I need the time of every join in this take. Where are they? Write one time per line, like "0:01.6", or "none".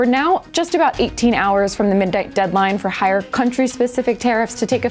none